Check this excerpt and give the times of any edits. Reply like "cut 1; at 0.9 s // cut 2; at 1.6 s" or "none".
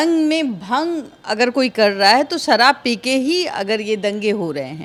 none